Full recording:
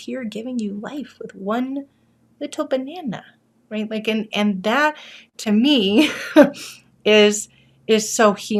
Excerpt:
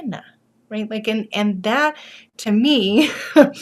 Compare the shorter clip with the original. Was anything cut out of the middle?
no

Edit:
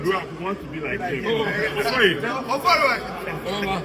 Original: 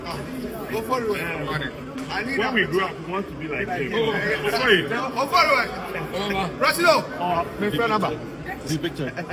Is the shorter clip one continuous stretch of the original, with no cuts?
yes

